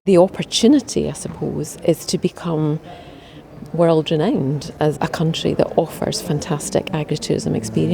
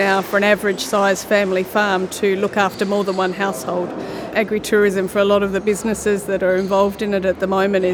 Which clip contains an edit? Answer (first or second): first